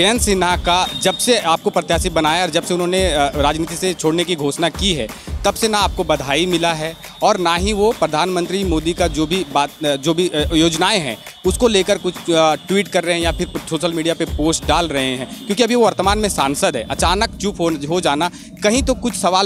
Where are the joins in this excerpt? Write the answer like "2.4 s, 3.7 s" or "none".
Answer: none